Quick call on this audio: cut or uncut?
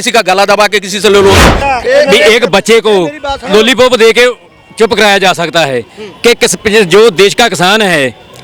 cut